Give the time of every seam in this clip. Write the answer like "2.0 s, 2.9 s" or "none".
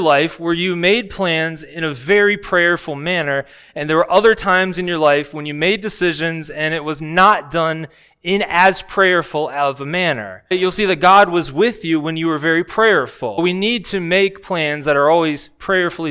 10.5 s, 13.4 s